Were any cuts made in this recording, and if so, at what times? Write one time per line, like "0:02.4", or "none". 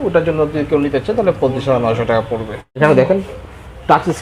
0:02.7